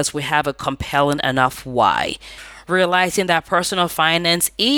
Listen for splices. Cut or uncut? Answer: cut